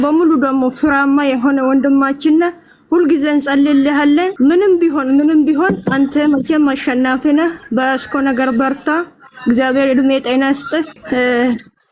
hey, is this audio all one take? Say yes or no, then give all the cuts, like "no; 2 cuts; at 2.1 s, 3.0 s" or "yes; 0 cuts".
no; 2 cuts; at 4.3 s, 11.0 s